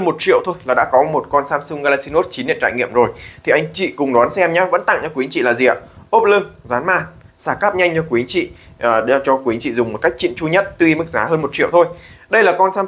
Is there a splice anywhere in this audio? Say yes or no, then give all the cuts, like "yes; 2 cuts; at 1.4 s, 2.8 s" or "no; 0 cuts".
no; 0 cuts